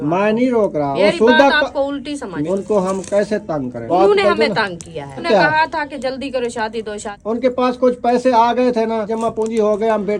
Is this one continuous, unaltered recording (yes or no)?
no